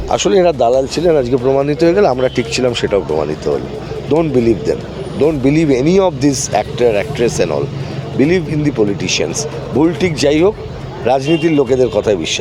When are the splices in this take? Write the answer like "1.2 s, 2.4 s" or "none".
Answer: none